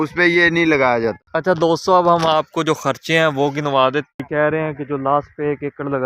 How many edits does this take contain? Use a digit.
2